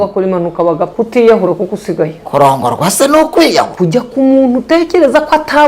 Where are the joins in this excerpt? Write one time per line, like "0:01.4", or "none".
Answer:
0:00.9
0:02.0
0:03.7

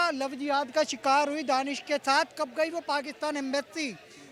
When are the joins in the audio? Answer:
none

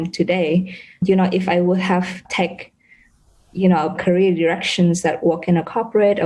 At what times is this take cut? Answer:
0:01.0
0:02.3
0:04.0

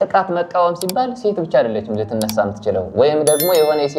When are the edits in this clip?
none

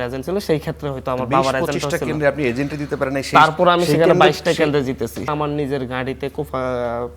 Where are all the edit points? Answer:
0:05.3

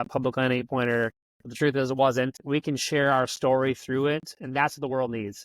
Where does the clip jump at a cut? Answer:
0:02.3

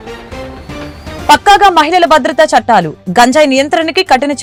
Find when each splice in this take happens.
none

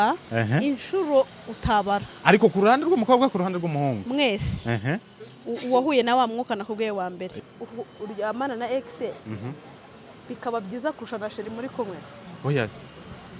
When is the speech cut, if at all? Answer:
0:07.3

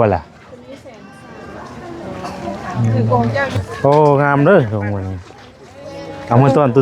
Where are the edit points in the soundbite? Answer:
0:03.5

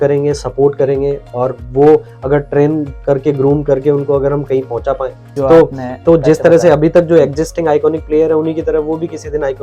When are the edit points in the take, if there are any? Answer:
0:05.4

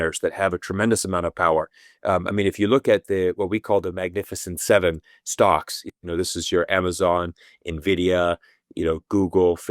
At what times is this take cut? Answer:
none

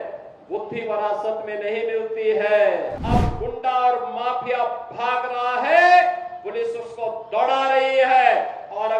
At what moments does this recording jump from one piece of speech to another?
0:03.0

